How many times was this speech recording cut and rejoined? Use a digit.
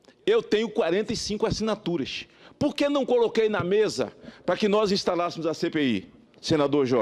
1